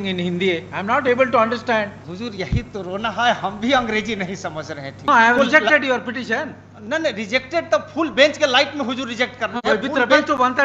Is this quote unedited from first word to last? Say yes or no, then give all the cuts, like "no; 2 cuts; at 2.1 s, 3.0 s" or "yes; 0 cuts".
no; 2 cuts; at 2.0 s, 5.1 s